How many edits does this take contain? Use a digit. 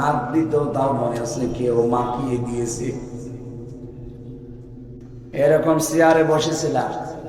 1